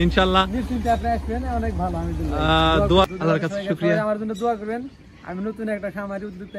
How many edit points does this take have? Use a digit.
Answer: 1